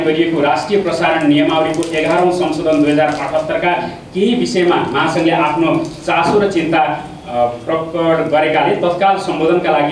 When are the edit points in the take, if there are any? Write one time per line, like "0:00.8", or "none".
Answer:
none